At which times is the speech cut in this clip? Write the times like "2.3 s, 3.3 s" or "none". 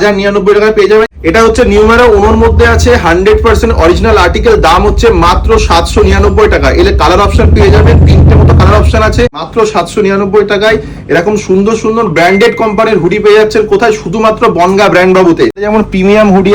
1.3 s, 9.5 s, 15.7 s